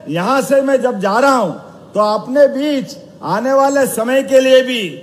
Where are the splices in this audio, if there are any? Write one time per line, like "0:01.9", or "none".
none